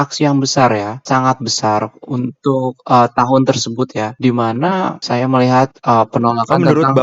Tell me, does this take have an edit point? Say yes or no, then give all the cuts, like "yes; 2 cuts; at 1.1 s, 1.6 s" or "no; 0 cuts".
yes; 3 cuts; at 1.0 s, 4.1 s, 5.0 s